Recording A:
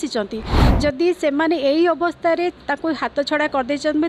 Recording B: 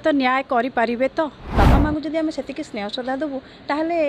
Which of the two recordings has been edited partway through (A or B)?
B